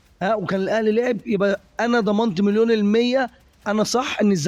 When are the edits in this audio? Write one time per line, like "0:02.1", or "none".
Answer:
none